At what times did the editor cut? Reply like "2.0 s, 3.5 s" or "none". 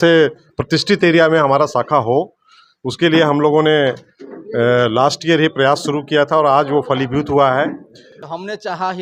8.1 s